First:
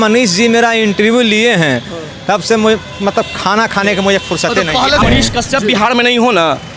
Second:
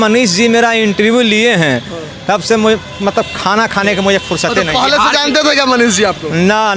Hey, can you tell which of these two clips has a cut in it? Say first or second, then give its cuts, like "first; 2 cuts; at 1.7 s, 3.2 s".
first; 1 cut; at 5.0 s